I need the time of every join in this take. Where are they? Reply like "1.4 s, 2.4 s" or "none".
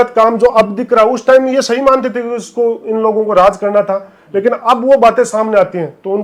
none

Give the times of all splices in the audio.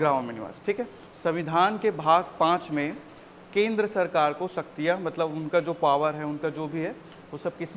1.0 s

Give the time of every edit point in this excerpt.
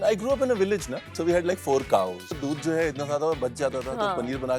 1.1 s, 2.4 s

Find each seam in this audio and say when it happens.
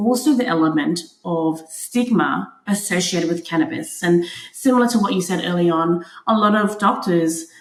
none

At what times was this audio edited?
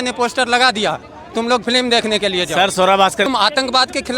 3.3 s

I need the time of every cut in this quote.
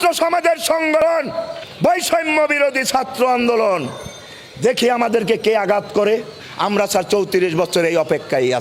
1.0 s

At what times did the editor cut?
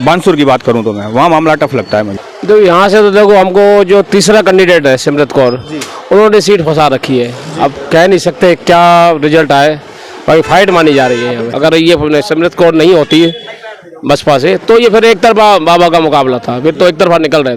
2.2 s, 11.5 s

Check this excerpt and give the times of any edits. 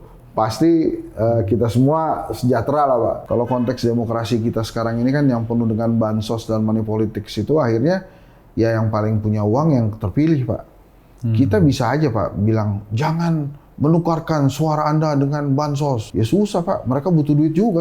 3.2 s, 16.0 s

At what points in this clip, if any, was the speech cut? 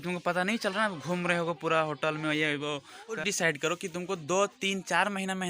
3.2 s

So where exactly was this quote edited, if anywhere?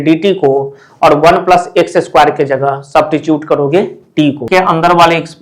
4.5 s

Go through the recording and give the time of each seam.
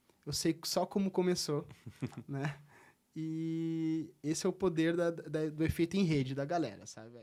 none

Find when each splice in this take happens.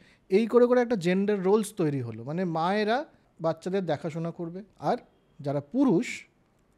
3.2 s, 4.7 s

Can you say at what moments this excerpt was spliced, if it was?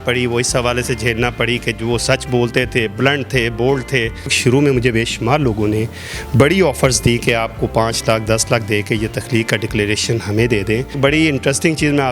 4.4 s, 11.0 s

